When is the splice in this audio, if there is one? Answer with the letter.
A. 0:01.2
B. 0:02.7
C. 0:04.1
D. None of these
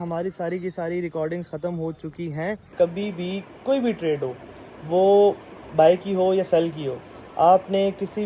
B